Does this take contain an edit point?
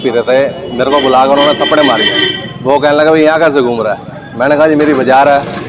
no; 0 cuts

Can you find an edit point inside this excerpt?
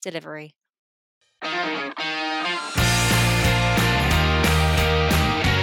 yes; 1 cut; at 1.0 s

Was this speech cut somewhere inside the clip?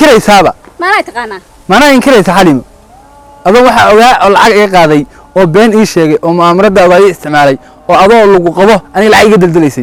no; 0 cuts

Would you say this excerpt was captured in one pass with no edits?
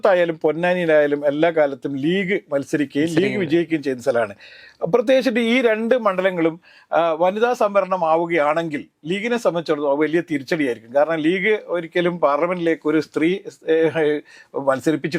yes; 0 cuts

